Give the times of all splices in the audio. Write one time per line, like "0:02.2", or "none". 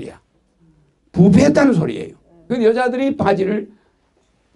0:02.5